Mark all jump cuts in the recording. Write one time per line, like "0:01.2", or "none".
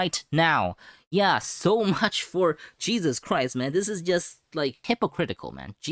0:04.8

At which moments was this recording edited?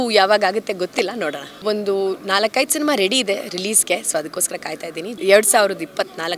0:01.6
0:05.1

